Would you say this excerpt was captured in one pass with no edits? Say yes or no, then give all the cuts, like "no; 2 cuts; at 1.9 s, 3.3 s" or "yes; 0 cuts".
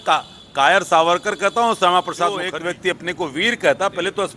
no; 1 cut; at 2.5 s